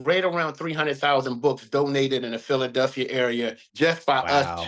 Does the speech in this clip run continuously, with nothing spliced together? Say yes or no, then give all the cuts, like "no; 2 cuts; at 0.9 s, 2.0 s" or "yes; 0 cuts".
no; 1 cut; at 3.6 s